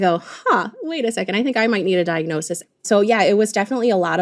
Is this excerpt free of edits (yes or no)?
no